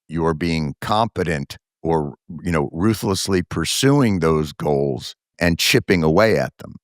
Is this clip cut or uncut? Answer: cut